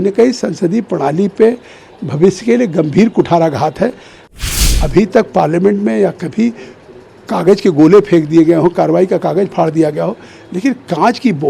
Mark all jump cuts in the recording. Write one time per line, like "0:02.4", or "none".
0:04.4